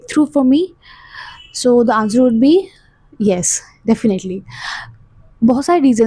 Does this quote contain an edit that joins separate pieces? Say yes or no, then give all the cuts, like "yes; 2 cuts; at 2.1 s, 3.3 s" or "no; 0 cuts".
no; 0 cuts